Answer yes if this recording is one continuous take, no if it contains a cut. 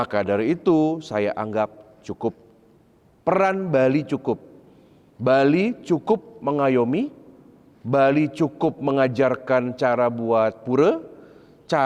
yes